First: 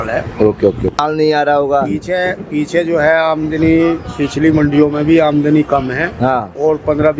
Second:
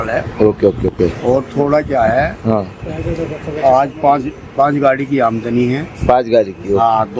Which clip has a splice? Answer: first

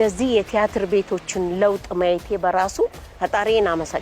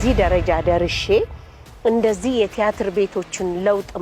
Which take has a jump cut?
first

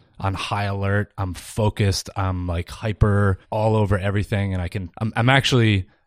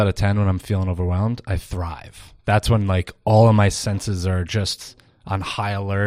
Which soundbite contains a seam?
first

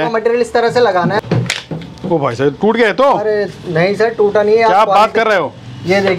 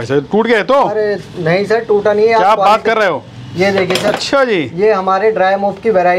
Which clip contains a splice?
first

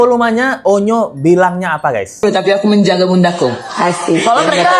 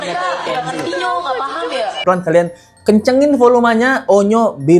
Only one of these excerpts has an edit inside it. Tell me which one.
second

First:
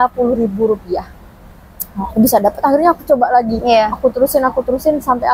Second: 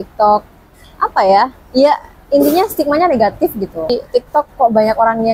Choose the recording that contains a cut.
second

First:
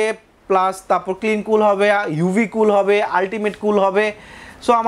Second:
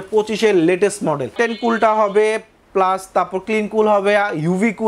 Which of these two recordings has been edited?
second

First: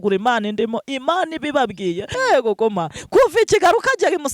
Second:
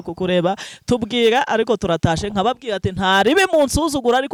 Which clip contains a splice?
first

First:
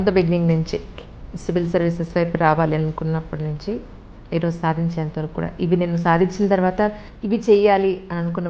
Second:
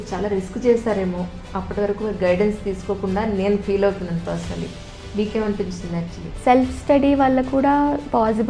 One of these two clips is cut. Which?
second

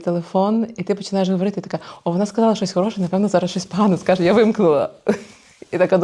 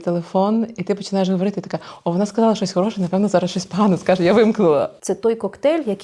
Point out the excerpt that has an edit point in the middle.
second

